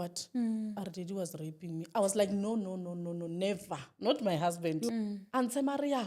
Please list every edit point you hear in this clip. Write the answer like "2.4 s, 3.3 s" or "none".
4.9 s